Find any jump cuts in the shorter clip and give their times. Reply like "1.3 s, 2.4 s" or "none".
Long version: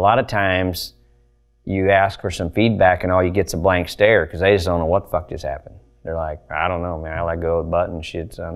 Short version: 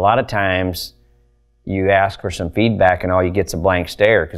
none